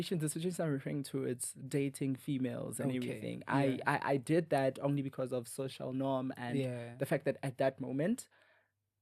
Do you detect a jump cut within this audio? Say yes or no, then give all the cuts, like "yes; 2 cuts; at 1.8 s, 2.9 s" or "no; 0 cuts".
no; 0 cuts